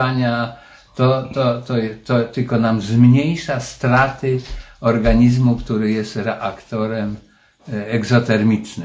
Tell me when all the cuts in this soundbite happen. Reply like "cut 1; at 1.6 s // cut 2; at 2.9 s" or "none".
none